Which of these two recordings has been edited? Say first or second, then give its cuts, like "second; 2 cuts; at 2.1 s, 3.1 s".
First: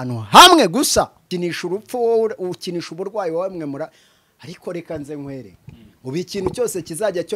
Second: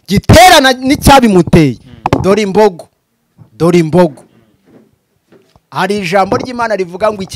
first; 1 cut; at 1.2 s